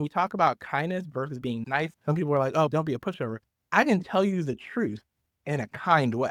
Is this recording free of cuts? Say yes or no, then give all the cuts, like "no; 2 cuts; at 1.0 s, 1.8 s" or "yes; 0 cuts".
yes; 0 cuts